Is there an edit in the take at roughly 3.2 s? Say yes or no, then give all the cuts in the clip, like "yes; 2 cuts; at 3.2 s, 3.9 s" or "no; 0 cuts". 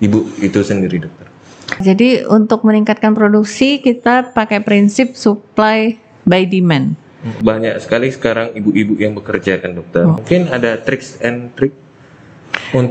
no; 3 cuts; at 1.8 s, 7.3 s, 10.2 s